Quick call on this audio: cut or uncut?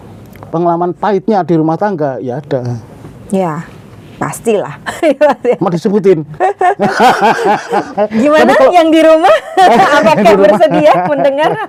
uncut